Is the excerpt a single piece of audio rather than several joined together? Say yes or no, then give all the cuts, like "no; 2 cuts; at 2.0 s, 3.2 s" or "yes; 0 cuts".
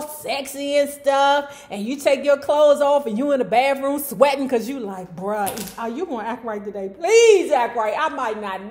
yes; 0 cuts